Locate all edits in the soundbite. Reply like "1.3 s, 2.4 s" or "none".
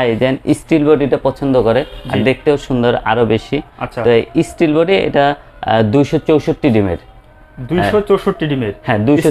none